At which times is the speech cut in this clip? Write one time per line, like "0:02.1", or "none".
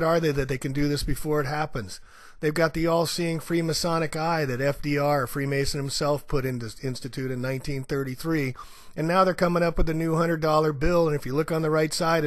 none